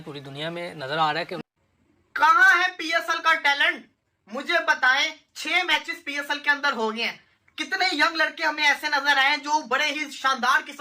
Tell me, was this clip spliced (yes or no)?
yes